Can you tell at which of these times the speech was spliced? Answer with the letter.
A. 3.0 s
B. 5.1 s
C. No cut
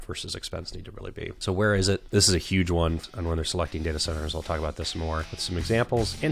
A